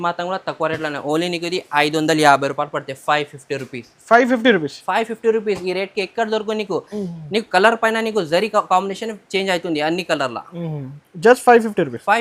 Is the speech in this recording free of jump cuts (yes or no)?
yes